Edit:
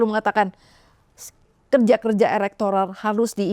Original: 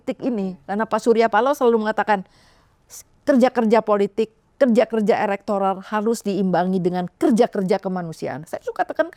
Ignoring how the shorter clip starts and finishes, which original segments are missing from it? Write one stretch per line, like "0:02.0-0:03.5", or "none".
0:03.2-0:04.3